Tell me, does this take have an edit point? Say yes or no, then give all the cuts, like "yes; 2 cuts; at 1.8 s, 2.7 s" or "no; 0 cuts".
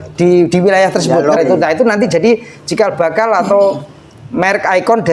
yes; 1 cut; at 1.4 s